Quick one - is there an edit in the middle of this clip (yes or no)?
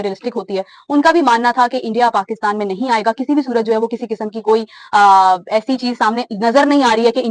no